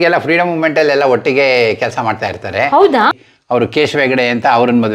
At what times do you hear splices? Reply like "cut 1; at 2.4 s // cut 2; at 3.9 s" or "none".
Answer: cut 1; at 3.2 s